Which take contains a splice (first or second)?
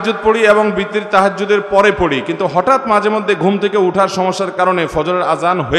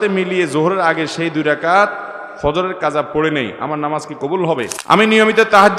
second